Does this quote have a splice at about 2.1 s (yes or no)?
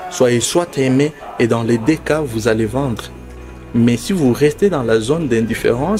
no